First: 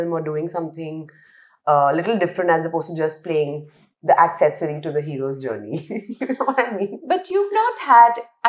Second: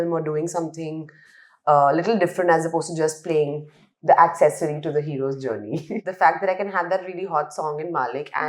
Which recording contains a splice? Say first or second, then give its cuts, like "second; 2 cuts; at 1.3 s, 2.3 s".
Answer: second; 1 cut; at 6.0 s